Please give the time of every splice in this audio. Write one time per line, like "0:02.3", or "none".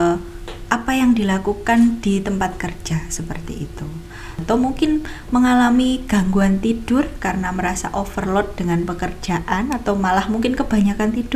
0:04.4

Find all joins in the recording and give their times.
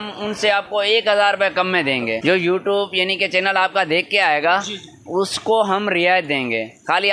0:02.2

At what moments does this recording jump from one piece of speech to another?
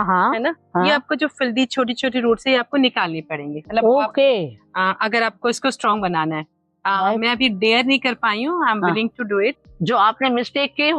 0:09.6

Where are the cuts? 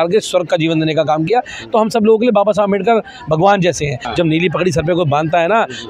0:04.0

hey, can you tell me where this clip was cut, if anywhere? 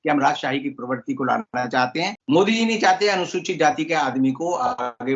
0:02.2

